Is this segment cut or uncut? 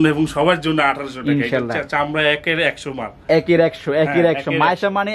uncut